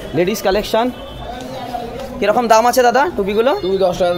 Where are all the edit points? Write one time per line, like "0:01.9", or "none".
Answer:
none

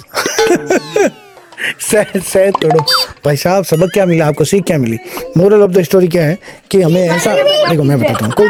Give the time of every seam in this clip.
none

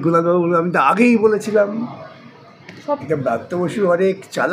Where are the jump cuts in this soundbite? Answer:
0:03.0

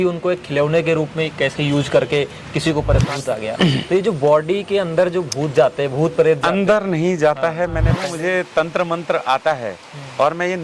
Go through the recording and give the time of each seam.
0:03.2
0:08.0

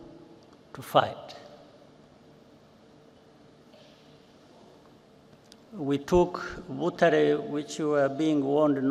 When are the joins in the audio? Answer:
none

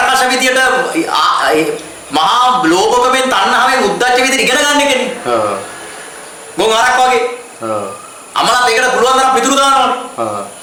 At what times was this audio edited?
none

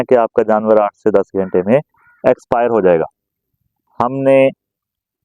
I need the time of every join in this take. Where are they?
0:03.3

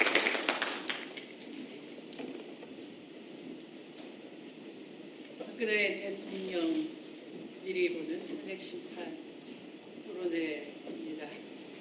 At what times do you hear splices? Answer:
none

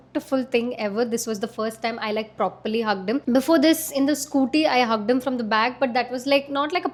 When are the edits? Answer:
none

